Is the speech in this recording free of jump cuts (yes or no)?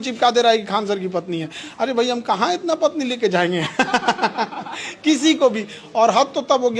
yes